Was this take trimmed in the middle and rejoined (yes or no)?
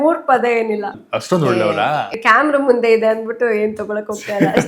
yes